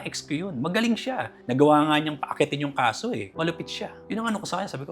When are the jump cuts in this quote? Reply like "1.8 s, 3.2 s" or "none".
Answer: 3.3 s